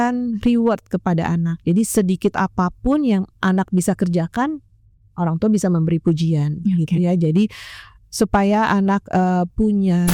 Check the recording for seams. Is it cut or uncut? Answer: uncut